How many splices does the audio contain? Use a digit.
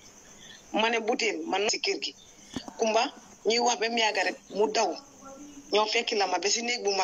1